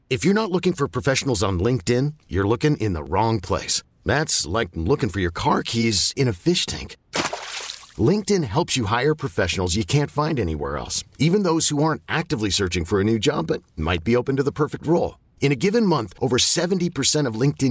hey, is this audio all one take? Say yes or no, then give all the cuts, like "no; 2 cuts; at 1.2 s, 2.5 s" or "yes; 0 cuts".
yes; 0 cuts